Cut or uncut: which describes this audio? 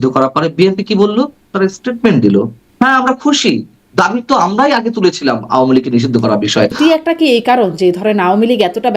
cut